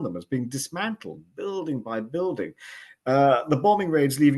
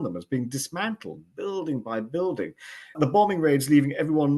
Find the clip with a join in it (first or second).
second